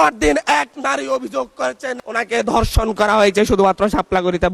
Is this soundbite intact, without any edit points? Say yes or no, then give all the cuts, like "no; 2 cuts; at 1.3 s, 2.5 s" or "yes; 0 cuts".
yes; 0 cuts